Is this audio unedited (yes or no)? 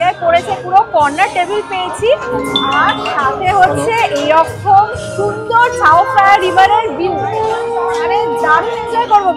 yes